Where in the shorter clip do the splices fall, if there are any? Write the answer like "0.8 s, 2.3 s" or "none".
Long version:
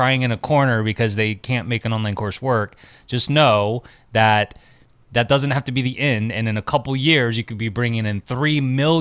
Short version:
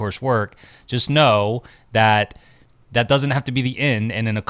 none

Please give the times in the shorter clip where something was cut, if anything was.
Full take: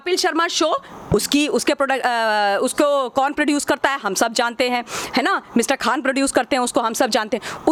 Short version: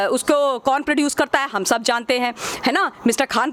none

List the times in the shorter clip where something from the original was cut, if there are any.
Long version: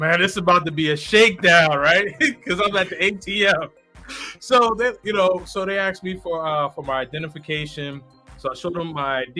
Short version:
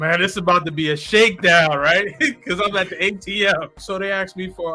3.8 s

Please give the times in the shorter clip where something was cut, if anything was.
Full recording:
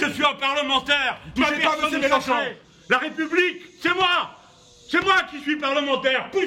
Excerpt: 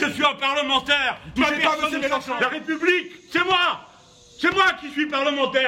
2.3 s

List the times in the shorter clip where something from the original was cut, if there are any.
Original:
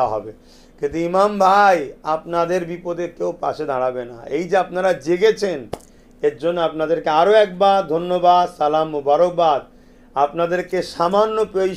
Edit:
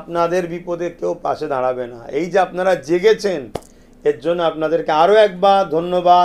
none

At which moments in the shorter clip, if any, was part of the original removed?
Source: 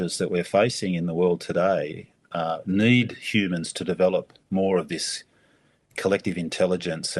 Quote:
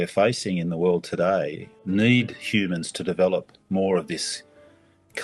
1.8 s

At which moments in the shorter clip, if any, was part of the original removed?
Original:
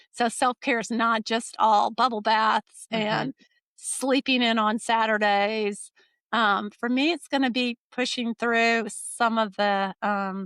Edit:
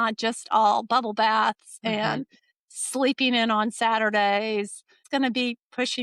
5.0 s

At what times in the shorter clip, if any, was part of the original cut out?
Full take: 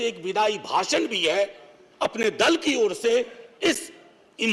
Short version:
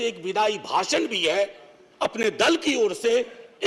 none

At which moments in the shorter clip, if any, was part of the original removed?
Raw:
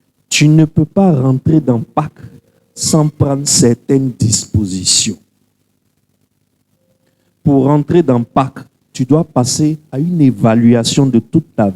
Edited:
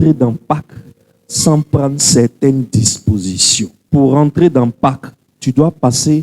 3.8 s

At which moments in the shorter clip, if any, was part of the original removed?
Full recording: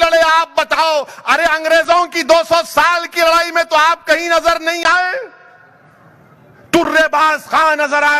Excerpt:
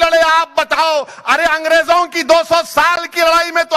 none

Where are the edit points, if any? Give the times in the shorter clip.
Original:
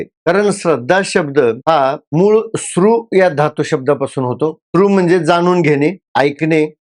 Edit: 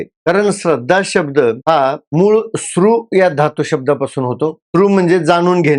none

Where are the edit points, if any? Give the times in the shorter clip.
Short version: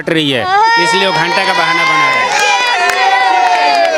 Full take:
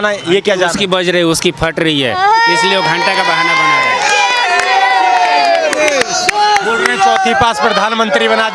none

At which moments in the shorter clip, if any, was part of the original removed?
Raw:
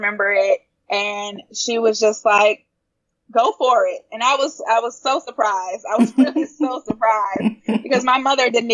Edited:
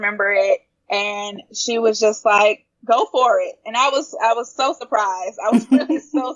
2.7 s

